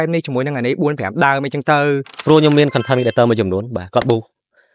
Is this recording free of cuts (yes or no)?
no